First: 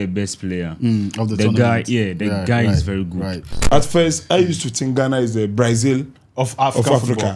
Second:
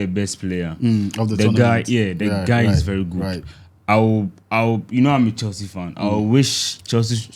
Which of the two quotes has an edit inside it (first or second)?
first